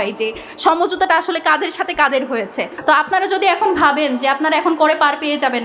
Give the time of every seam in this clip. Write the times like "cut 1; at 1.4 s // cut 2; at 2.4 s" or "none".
cut 1; at 2.7 s